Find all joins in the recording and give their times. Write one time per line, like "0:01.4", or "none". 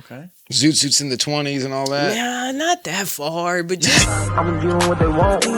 0:03.9